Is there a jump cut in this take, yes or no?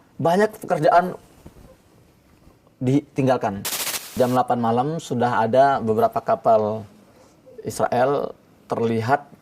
yes